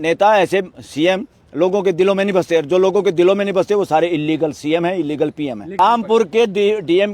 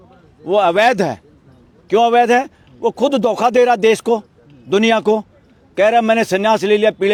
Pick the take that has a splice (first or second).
first